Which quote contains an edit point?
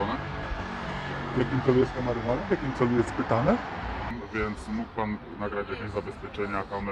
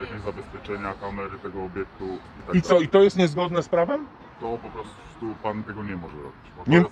first; 1 cut; at 4.1 s

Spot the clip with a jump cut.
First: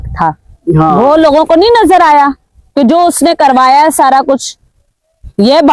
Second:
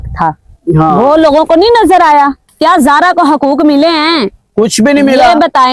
second; 1 cut; at 2.5 s

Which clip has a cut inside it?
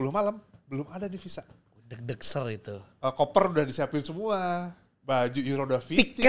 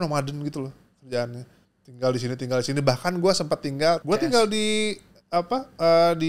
second; 1 cut; at 4.0 s

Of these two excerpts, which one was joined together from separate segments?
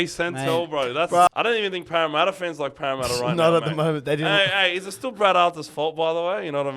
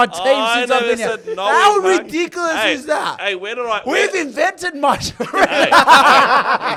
first; 1 cut; at 1.3 s

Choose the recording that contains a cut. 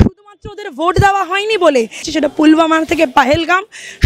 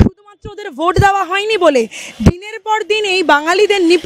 first; 1 cut; at 2.1 s

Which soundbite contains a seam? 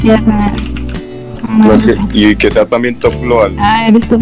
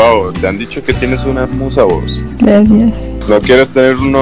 second; 2 cuts; at 2.2 s, 3.1 s

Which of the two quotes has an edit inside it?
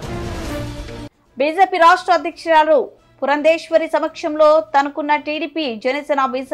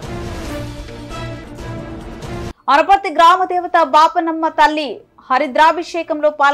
first; 1 cut; at 1.0 s

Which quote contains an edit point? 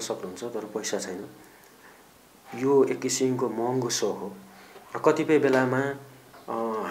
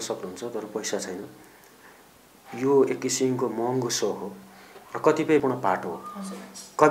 second; 1 cut; at 5.4 s

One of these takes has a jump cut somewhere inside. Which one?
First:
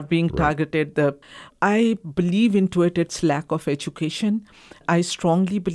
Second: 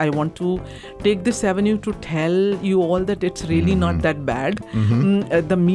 first; 2 cuts; at 1.4 s, 4.8 s

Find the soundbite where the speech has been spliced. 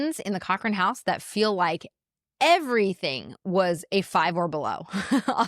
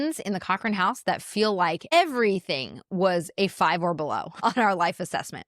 second; 2 cuts; at 1.9 s, 4.4 s

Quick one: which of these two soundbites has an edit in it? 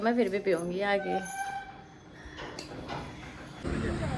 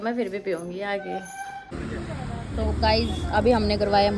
second; 1 cut; at 1.6 s

